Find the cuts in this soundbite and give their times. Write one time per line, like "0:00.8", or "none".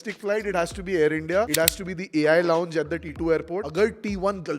0:01.5
0:03.3